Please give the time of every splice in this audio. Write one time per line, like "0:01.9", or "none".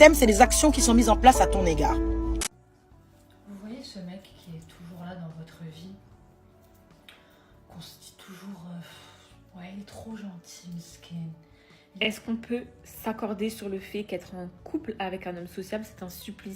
0:02.4
0:12.0